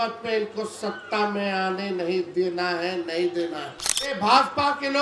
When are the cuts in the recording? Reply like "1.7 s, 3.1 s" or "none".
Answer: 4.1 s